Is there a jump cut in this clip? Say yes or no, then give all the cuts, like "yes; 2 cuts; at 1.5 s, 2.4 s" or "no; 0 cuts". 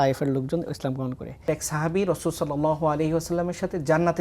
yes; 1 cut; at 1.4 s